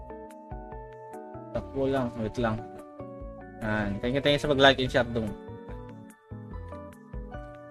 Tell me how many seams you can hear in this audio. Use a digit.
0